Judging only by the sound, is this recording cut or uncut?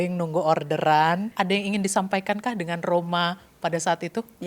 cut